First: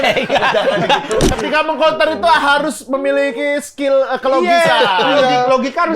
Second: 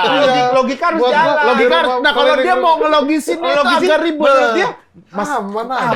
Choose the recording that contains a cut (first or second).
first